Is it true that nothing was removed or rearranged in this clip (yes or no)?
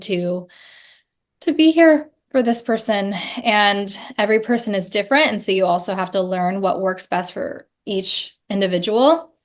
yes